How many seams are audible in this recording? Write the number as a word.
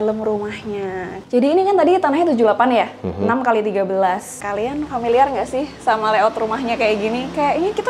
two